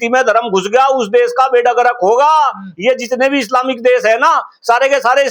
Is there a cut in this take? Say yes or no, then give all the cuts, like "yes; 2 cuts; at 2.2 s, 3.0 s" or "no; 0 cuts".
no; 0 cuts